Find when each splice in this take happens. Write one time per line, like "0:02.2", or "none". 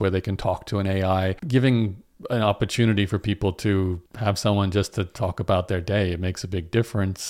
0:01.4